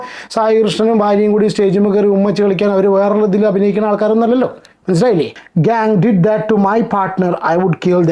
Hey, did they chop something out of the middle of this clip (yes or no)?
yes